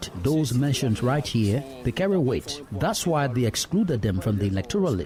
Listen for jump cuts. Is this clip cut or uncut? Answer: uncut